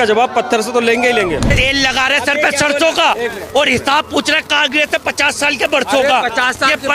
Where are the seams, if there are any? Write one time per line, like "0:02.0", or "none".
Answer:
0:01.5